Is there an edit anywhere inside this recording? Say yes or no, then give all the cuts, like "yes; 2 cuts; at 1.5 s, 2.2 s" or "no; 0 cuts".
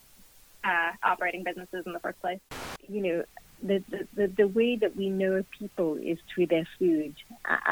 yes; 1 cut; at 2.4 s